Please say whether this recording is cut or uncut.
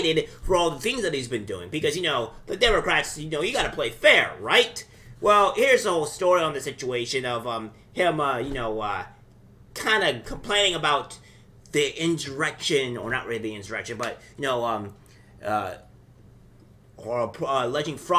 uncut